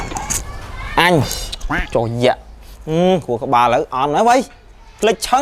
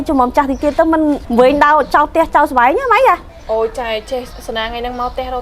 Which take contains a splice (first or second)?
second